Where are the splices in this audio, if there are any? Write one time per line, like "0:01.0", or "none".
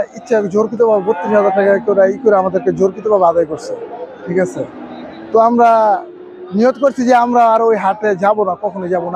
none